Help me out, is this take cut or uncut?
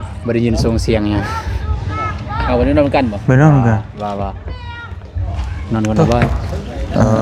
uncut